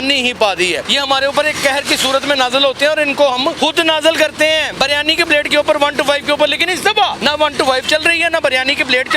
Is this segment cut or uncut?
cut